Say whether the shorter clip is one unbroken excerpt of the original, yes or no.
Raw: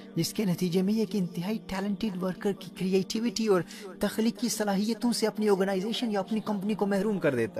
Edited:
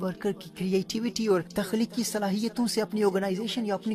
no